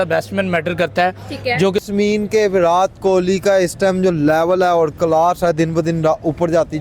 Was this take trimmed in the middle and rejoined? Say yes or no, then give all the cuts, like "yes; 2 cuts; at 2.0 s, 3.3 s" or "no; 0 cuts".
yes; 1 cut; at 1.8 s